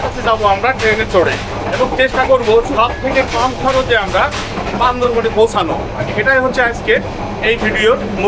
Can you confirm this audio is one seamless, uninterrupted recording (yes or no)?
no